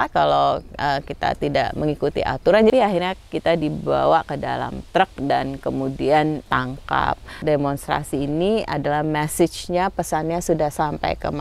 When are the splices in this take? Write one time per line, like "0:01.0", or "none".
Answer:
0:02.7
0:07.2